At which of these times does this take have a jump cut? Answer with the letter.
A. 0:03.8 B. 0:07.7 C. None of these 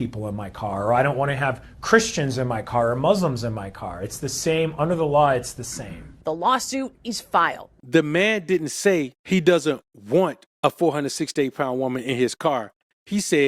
B